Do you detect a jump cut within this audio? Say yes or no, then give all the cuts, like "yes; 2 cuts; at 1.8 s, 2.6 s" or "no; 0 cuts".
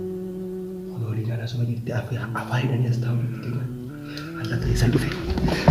yes; 1 cut; at 1.0 s